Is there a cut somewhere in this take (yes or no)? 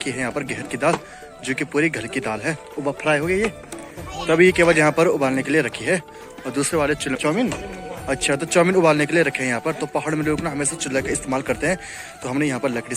no